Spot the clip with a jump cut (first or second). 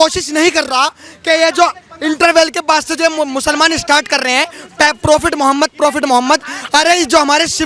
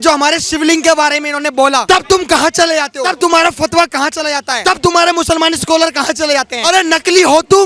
second